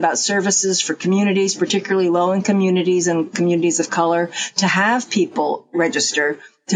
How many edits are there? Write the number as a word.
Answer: zero